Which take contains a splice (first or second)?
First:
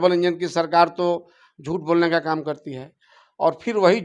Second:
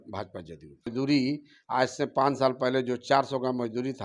second